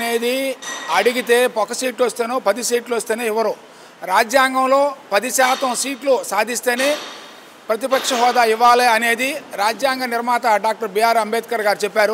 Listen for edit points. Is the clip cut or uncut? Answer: uncut